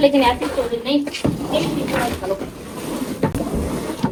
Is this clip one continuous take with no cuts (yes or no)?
yes